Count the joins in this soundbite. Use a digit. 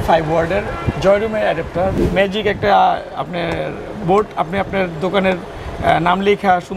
1